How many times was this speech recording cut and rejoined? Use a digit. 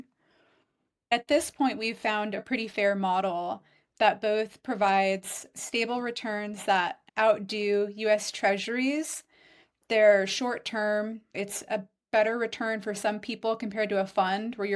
1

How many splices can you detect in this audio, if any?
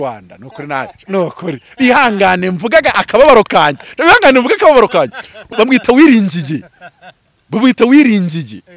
1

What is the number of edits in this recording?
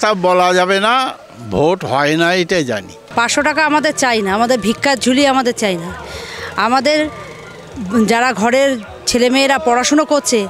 1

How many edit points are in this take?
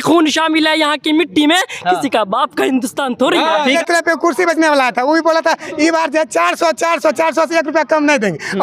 1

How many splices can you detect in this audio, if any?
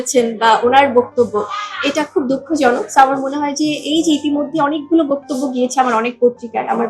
0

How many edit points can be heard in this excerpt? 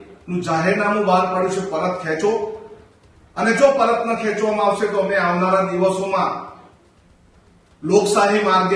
0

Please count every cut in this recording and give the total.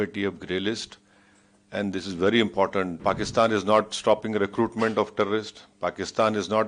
1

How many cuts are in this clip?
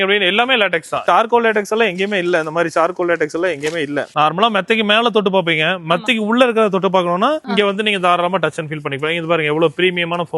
2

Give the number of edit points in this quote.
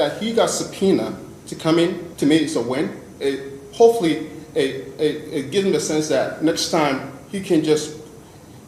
1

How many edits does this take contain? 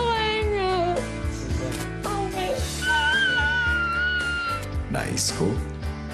0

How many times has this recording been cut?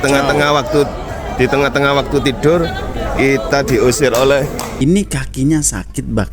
1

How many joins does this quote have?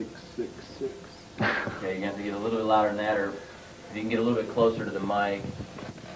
0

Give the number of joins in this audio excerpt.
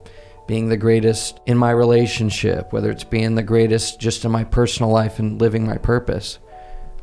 1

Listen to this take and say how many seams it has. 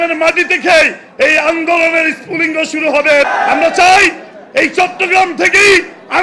1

